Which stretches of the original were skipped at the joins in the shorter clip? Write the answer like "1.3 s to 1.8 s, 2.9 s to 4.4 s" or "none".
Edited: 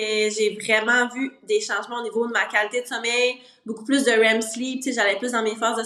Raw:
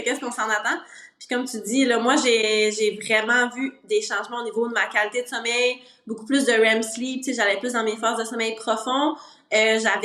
none